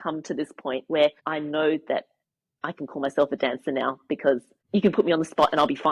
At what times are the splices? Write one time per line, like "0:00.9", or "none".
0:01.2
0:04.5